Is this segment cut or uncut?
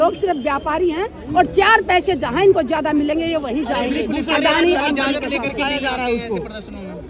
uncut